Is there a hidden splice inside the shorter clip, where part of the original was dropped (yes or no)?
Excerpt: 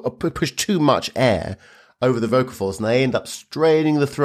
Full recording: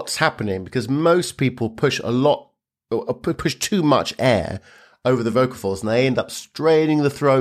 no